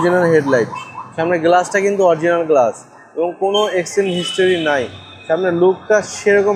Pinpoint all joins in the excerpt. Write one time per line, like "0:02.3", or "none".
none